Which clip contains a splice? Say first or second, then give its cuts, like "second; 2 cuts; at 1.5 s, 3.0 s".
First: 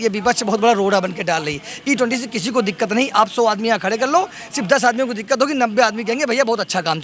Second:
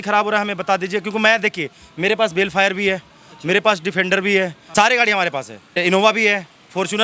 second; 2 cuts; at 4.6 s, 5.8 s